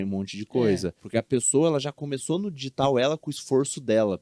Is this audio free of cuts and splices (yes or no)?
no